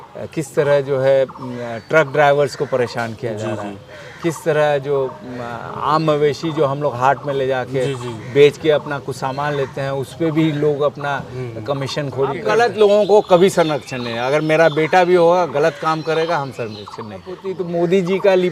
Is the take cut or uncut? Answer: cut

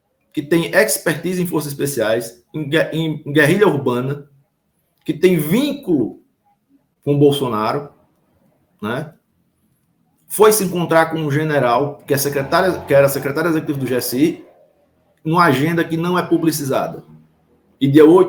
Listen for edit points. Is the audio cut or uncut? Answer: uncut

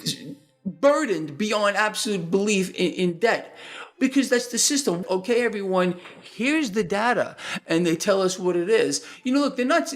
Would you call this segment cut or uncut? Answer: cut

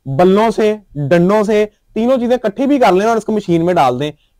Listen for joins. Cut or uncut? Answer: uncut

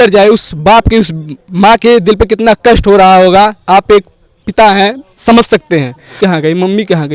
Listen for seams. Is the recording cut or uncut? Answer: cut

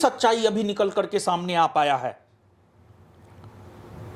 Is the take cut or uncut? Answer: uncut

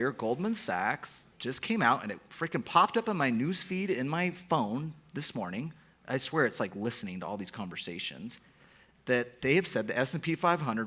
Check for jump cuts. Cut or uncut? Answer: uncut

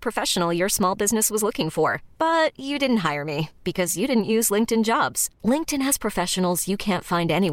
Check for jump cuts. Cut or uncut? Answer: uncut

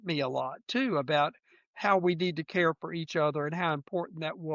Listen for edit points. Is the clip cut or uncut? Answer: uncut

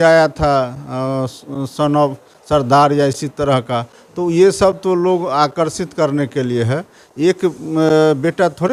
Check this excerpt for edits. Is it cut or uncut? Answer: uncut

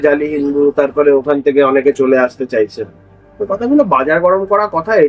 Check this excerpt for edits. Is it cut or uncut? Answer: uncut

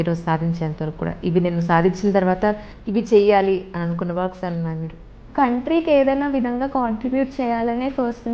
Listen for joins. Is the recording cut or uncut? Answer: cut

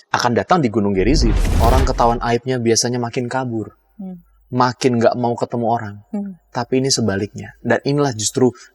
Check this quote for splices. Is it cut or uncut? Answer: cut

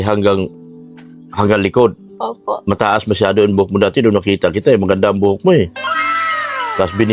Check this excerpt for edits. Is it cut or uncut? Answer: uncut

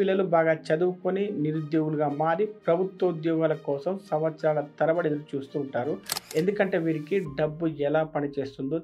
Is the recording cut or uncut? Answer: uncut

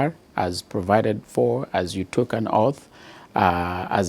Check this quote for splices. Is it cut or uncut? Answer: uncut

